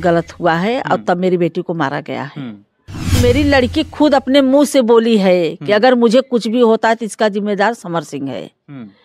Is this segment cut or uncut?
cut